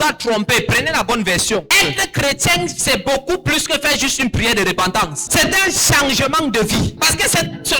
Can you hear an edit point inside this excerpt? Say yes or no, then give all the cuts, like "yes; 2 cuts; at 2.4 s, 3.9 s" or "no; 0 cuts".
yes; 3 cuts; at 1.7 s, 5.3 s, 7.0 s